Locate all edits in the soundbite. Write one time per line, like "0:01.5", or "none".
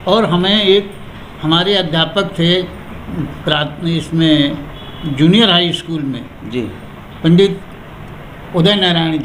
none